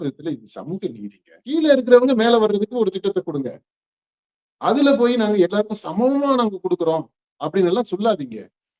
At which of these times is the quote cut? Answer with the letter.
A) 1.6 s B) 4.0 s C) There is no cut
A